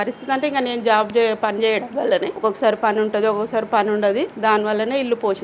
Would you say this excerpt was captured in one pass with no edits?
no; 2 cuts; at 2.3 s, 4.3 s

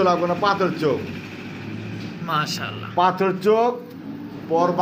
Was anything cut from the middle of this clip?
no; 0 cuts

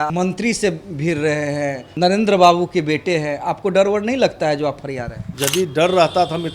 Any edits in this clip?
yes; 2 cuts; at 1.9 s, 5.3 s

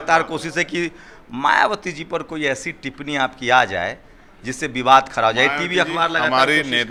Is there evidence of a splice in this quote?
no; 0 cuts

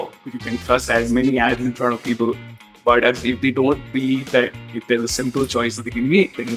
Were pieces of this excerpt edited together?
no; 0 cuts

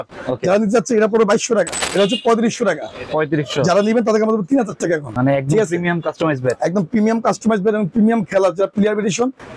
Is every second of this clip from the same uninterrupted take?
no; 2 cuts; at 1.8 s, 5.2 s

